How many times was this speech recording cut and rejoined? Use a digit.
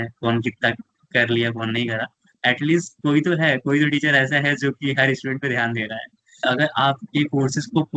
2